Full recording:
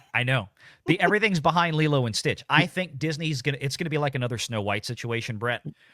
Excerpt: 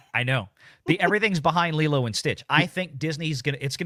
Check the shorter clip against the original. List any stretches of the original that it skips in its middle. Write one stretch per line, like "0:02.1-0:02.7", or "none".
none